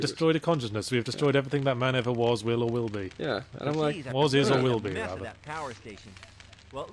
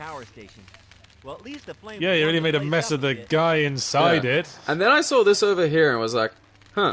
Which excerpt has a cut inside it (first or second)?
second